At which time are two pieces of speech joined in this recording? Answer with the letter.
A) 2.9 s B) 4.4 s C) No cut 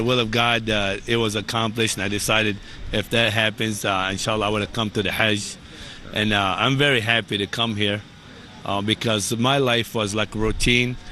B